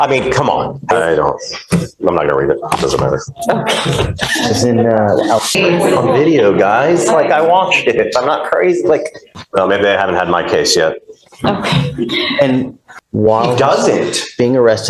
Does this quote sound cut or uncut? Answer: cut